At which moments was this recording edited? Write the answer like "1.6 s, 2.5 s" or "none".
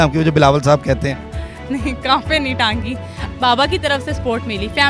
3.1 s